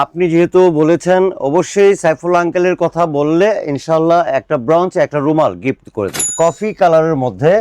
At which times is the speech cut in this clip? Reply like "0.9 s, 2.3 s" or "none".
6.3 s